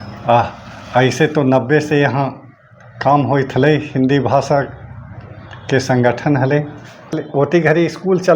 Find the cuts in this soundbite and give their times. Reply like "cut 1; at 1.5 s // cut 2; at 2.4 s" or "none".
cut 1; at 7.2 s